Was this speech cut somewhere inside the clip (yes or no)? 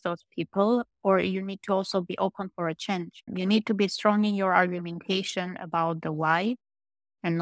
yes